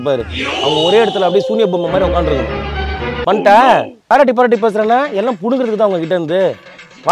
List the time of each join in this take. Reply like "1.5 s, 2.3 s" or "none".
4.1 s